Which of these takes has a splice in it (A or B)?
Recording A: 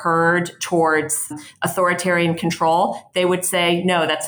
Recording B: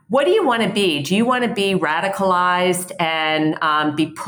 A